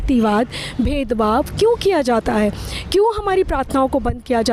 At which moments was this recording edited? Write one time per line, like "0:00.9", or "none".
none